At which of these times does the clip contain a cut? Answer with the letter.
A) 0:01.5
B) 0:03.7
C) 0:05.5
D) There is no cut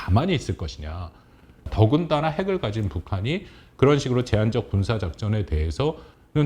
A